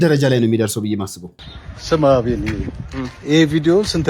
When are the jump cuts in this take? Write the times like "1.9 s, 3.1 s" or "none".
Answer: 1.3 s